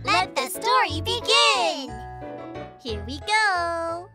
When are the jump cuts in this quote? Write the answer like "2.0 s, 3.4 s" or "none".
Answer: 1.9 s